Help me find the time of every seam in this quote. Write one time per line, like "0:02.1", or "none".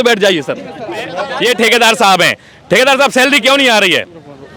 0:01.2